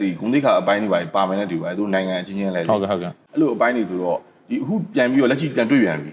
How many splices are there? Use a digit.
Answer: 1